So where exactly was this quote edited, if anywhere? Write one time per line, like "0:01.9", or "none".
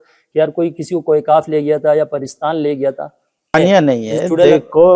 0:03.5